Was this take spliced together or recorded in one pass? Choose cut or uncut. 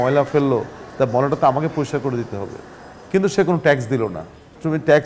uncut